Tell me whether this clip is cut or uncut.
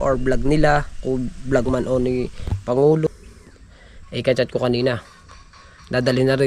cut